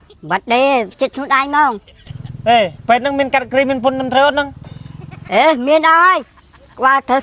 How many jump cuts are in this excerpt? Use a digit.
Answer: 0